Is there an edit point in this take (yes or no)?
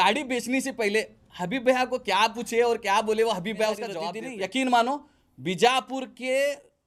yes